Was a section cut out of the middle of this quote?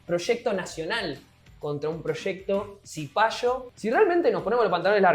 yes; 1 cut; at 3.7 s

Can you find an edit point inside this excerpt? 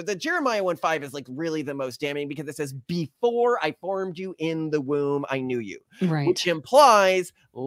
no; 0 cuts

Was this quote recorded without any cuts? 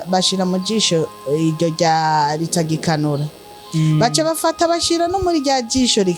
yes; 0 cuts

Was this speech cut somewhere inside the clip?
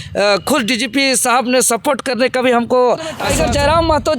yes; 1 cut; at 3.2 s

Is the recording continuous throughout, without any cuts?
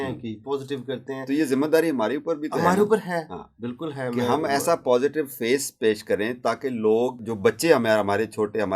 no; 1 cut; at 7.2 s

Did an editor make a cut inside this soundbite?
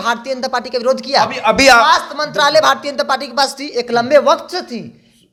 no; 0 cuts

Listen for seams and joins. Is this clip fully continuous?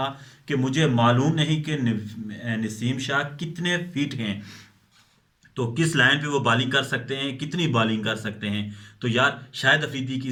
yes; 0 cuts

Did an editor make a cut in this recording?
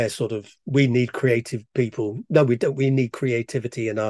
no; 0 cuts

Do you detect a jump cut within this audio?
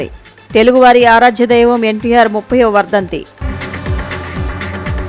no; 0 cuts

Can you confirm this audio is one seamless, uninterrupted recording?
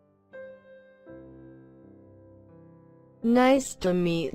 no; 1 cut; at 3.2 s

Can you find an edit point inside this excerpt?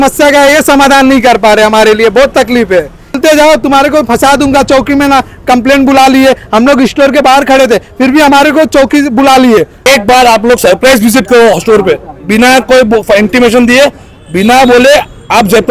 yes; 2 cuts; at 3.2 s, 9.9 s

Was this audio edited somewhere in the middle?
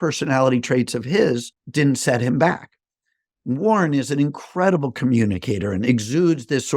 yes; 1 cut; at 1.6 s

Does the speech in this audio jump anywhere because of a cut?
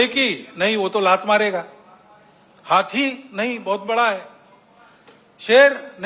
no; 0 cuts

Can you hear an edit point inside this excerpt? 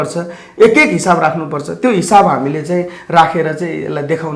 no; 0 cuts

